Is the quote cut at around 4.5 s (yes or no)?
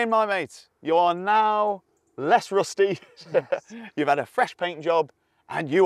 no